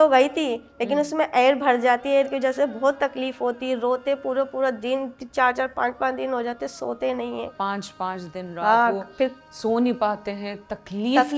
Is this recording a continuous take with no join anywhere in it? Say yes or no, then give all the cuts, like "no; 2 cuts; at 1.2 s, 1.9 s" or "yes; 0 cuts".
no; 1 cut; at 7.5 s